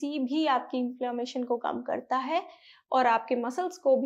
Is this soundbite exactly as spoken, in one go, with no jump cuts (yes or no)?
yes